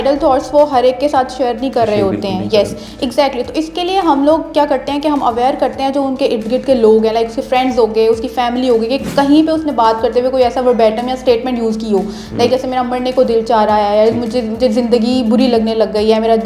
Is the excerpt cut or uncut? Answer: uncut